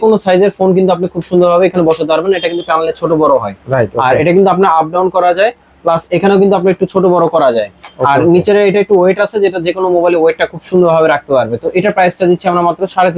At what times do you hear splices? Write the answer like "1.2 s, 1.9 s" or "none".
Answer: none